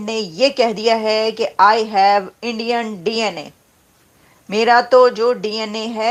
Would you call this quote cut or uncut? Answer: uncut